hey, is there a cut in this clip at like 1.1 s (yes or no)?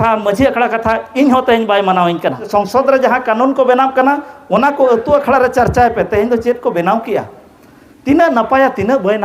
no